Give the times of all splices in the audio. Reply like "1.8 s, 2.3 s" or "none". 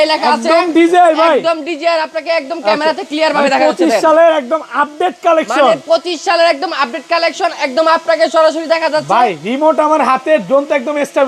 none